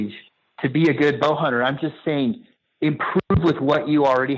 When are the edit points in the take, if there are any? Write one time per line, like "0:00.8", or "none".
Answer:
none